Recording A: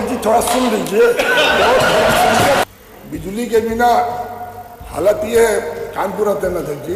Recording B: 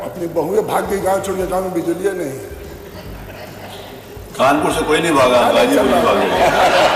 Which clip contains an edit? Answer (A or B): A